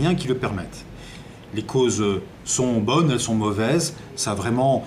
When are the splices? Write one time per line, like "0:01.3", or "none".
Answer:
0:03.5